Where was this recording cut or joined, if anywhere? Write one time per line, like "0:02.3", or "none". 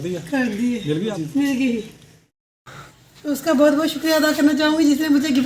0:01.0
0:02.3